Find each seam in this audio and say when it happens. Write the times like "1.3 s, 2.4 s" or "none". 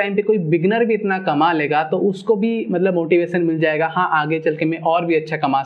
none